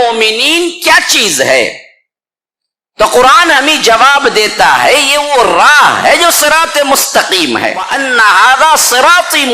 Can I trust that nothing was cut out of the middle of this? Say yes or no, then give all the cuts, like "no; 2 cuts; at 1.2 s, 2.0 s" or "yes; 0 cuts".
no; 1 cut; at 8.0 s